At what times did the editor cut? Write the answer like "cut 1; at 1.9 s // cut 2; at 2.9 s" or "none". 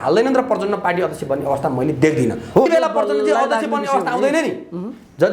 cut 1; at 2.7 s